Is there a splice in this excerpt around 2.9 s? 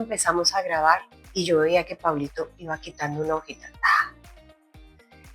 no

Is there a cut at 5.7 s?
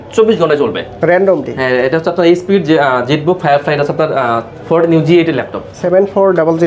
yes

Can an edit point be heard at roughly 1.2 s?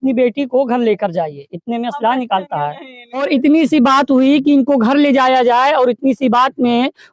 no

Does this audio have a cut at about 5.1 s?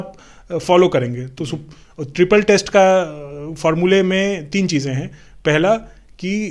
no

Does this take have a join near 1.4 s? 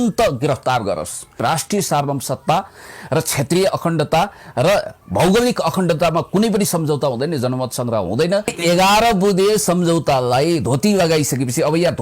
yes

